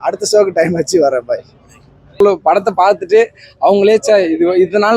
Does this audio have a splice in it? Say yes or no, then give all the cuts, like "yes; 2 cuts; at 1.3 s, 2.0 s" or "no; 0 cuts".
yes; 1 cut; at 2.2 s